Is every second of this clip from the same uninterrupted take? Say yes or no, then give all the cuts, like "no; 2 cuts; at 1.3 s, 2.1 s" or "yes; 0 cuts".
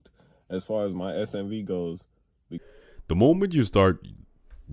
no; 1 cut; at 2.5 s